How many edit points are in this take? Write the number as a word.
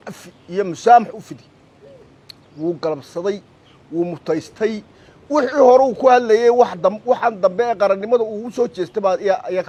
zero